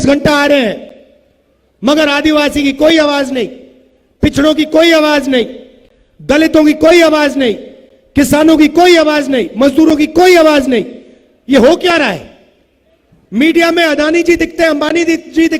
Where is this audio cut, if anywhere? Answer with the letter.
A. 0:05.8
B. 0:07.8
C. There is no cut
C